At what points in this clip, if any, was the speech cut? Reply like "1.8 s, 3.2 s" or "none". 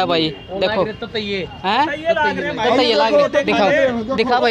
none